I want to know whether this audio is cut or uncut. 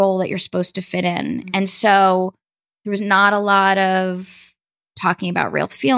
uncut